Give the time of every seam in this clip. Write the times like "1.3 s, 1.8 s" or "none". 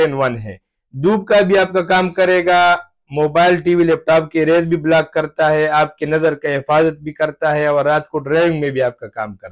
none